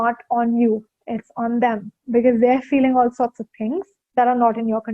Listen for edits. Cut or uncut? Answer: cut